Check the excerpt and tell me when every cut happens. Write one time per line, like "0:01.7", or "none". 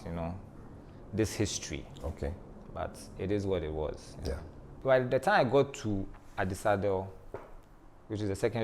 0:04.8